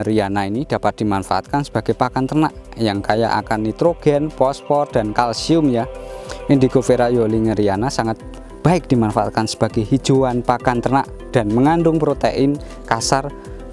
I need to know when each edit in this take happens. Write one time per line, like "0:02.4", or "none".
none